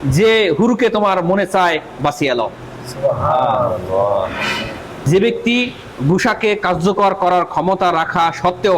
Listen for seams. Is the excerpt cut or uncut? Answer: cut